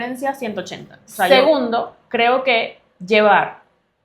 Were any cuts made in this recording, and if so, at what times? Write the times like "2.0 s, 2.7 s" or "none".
1.3 s